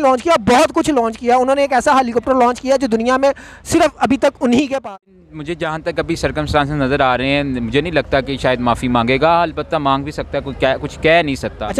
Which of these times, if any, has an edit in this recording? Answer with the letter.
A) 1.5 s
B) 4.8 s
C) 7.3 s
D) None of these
B